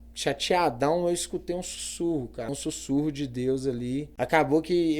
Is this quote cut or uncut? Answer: cut